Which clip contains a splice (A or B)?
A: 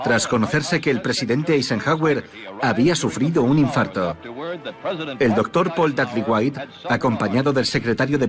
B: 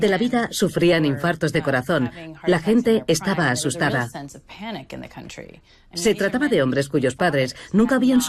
A